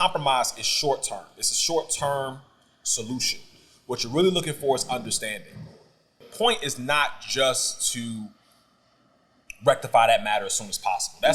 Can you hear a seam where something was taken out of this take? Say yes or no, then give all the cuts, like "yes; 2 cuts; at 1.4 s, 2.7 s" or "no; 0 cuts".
yes; 1 cut; at 6.3 s